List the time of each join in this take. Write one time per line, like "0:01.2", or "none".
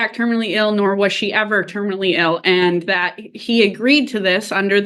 none